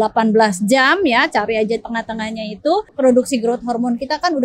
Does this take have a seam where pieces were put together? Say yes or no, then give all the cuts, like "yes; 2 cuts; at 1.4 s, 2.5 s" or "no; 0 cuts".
yes; 1 cut; at 2.9 s